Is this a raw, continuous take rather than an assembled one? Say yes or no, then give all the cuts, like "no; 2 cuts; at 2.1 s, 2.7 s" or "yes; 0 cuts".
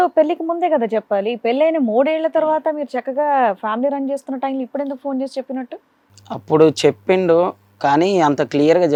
yes; 0 cuts